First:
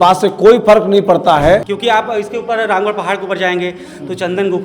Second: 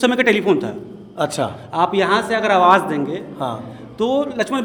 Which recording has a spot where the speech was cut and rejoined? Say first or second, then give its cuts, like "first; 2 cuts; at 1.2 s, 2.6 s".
first; 1 cut; at 1.7 s